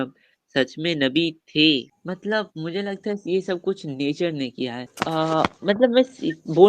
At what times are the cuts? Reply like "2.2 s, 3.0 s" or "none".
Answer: 1.9 s, 4.9 s